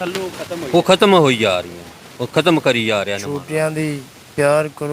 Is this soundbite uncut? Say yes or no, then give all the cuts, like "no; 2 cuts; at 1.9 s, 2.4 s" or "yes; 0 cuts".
no; 1 cut; at 3.2 s